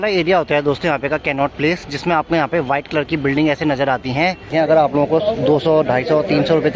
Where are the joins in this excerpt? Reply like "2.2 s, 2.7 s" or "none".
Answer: 4.5 s